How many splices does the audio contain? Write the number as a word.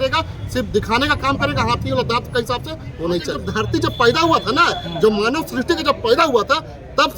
one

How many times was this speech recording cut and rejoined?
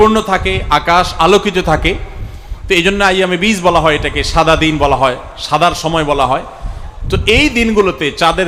zero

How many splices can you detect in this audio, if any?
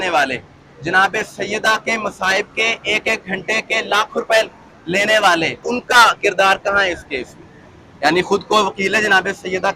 one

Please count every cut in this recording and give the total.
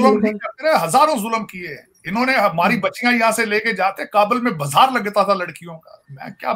zero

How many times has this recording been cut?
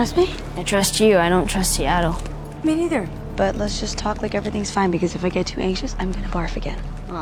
zero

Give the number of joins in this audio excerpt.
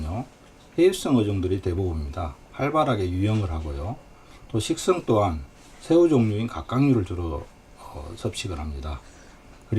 one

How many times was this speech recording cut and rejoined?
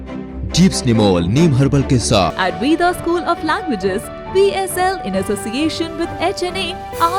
one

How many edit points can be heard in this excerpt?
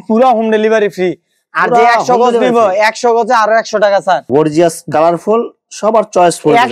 one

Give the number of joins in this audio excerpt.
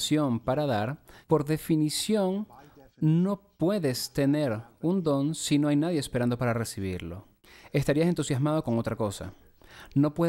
one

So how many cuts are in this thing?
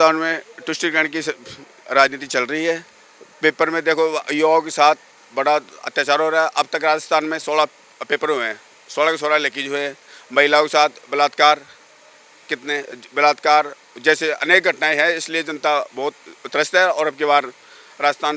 zero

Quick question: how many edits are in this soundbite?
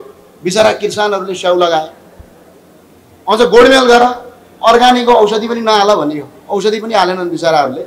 zero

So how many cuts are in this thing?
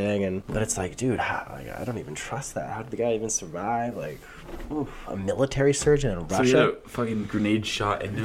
zero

